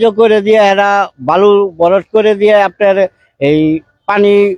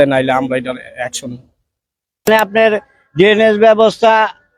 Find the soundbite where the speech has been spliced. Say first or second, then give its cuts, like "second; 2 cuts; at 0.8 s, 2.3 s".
second; 1 cut; at 2.3 s